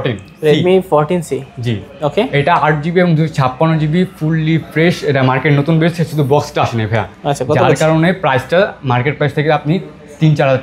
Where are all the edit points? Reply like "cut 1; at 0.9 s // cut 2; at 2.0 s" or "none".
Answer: none